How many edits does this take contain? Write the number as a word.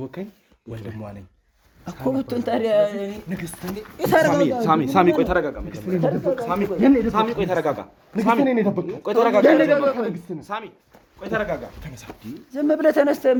zero